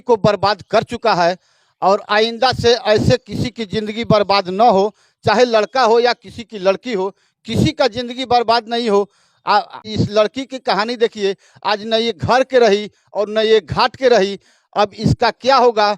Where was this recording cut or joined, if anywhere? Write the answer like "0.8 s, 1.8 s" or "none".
9.9 s